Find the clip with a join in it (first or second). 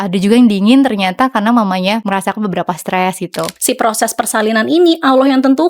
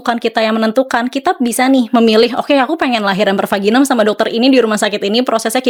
first